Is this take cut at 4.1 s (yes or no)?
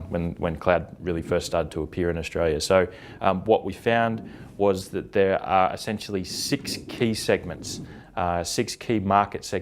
yes